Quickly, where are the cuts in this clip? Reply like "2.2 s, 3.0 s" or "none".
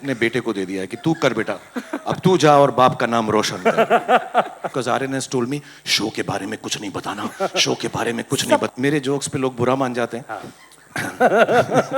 4.7 s, 8.7 s

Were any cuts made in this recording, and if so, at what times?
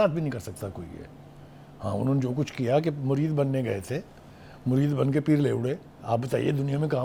none

